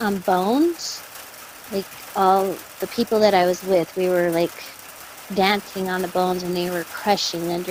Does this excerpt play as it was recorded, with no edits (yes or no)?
yes